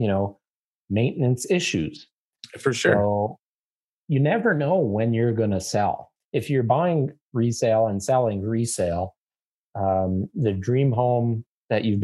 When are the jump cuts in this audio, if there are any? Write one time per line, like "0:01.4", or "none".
0:06.1